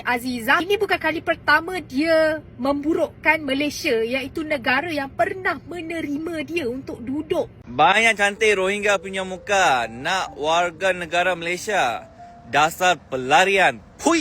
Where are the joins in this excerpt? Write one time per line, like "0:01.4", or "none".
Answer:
0:07.6